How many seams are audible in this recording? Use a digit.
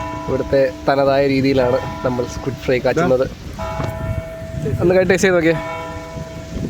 1